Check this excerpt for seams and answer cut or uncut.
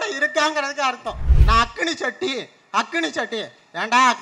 cut